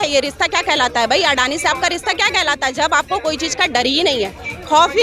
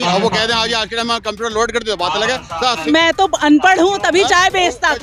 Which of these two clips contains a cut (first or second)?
second